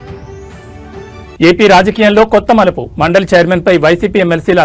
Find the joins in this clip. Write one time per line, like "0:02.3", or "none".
0:01.3